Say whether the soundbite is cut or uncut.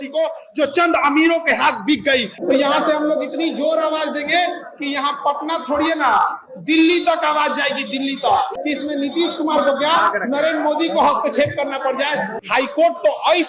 cut